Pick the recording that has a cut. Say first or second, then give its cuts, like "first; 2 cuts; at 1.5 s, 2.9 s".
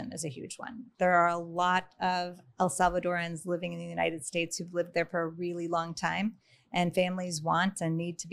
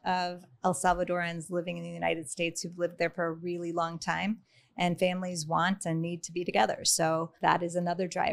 second; 1 cut; at 7.3 s